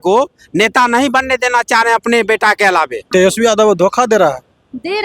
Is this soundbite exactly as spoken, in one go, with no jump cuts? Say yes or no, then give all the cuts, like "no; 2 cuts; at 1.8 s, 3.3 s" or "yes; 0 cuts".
no; 1 cut; at 3.0 s